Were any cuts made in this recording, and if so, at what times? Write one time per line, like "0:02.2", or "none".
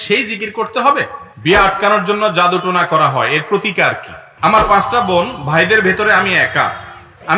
0:01.2
0:04.2